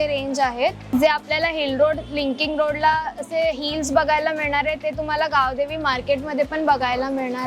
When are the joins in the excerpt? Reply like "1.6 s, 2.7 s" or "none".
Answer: 0.9 s